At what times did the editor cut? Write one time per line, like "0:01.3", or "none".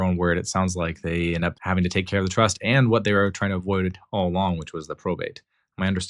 0:01.6